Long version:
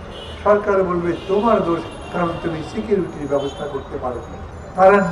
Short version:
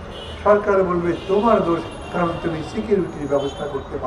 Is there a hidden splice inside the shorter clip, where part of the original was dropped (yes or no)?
no